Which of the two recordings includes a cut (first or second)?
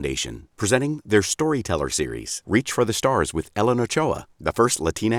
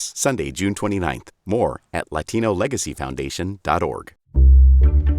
second